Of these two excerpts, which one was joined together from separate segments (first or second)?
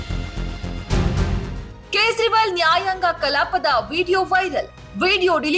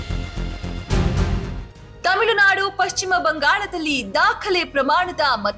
second